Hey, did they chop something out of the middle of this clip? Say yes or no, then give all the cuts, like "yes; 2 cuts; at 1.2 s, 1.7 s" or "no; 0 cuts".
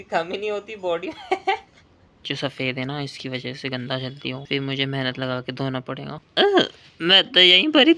yes; 2 cuts; at 2.3 s, 4.4 s